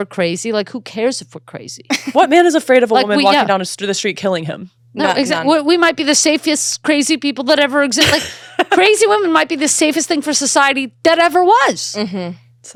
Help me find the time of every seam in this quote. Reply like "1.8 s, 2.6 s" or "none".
none